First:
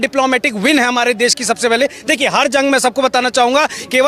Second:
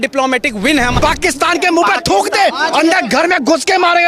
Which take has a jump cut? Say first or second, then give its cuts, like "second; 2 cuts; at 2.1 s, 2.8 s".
second; 1 cut; at 0.9 s